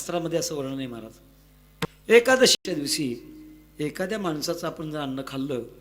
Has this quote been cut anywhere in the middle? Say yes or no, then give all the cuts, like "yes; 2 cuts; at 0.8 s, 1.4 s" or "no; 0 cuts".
yes; 2 cuts; at 1.9 s, 2.6 s